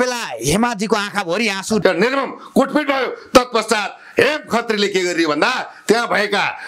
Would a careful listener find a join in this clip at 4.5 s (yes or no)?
no